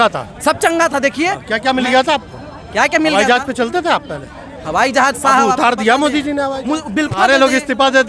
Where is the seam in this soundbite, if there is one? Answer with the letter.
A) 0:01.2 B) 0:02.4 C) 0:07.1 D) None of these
C